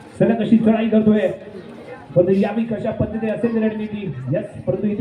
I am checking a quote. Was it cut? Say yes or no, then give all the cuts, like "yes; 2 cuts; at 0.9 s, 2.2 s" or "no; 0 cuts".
no; 0 cuts